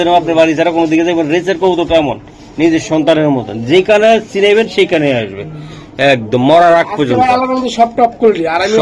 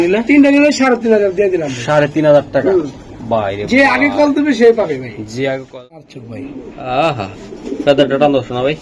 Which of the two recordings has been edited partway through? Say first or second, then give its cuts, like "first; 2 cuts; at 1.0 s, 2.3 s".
second; 1 cut; at 6.1 s